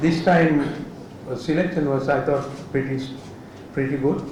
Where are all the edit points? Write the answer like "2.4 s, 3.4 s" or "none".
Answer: none